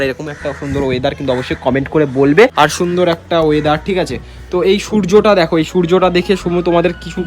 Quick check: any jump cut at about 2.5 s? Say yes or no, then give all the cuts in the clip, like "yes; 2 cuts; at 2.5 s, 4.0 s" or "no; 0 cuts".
yes; 1 cut; at 2.5 s